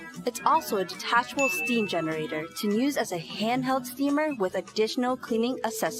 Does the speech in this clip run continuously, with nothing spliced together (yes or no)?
yes